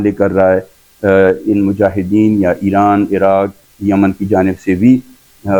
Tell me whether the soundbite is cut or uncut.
uncut